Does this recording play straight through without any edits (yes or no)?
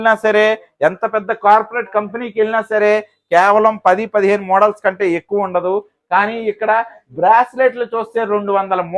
yes